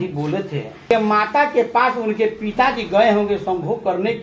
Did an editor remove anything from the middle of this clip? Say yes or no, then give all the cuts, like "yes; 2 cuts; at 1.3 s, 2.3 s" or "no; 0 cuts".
yes; 1 cut; at 0.9 s